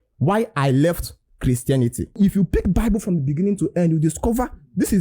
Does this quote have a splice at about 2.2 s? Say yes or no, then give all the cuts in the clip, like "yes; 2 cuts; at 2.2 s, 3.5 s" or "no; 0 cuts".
yes; 1 cut; at 2.2 s